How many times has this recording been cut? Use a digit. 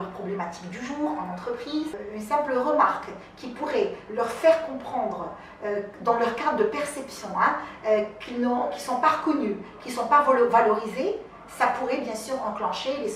1